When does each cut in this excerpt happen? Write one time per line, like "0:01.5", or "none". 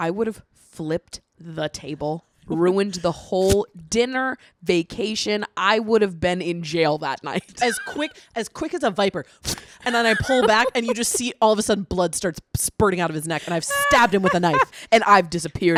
none